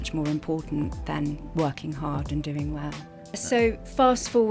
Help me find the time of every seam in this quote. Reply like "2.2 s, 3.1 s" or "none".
3.4 s